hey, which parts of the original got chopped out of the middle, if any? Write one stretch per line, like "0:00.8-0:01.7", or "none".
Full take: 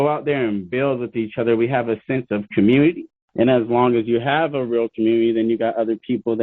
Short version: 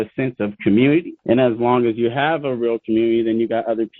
0:03.1-0:03.2